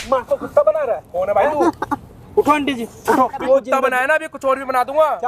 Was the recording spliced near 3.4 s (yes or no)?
yes